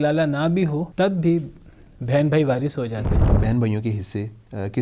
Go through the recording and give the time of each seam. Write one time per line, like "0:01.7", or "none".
0:00.9
0:03.3